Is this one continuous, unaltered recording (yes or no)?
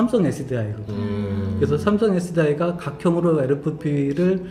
yes